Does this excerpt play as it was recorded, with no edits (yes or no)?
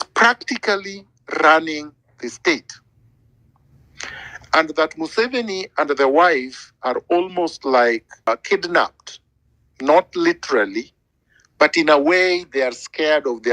no